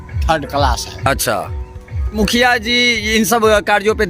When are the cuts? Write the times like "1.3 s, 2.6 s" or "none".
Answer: 2.1 s